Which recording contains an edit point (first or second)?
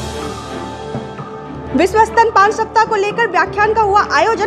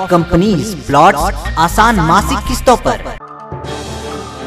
first